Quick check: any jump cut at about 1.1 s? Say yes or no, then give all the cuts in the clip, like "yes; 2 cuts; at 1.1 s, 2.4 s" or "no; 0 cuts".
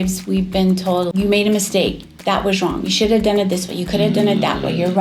yes; 1 cut; at 1.1 s